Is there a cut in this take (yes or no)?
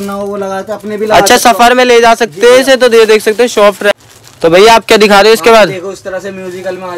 no